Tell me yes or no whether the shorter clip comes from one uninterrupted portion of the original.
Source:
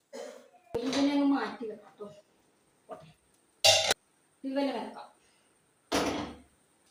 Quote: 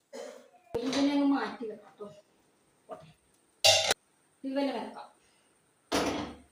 yes